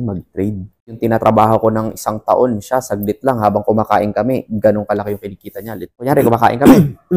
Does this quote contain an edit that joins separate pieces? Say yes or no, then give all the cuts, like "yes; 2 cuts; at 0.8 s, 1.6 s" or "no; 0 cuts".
yes; 2 cuts; at 1.0 s, 6.0 s